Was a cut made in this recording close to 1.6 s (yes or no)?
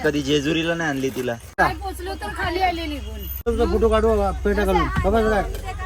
yes